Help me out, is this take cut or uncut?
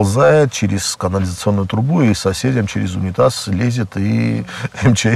uncut